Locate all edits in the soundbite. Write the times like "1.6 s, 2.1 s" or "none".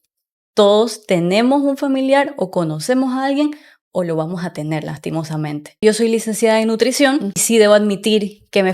5.8 s, 7.4 s